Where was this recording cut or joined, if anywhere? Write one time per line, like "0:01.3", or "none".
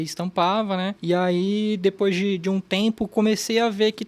0:01.0